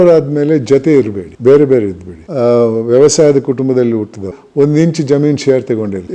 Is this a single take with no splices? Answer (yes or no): no